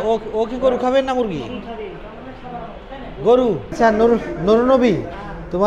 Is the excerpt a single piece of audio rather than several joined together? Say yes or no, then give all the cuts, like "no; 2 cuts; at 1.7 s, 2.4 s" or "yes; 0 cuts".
no; 1 cut; at 3.7 s